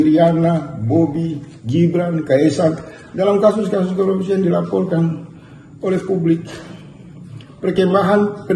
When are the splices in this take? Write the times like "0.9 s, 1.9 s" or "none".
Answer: none